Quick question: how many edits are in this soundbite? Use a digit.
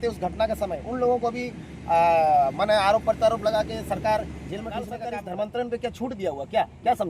1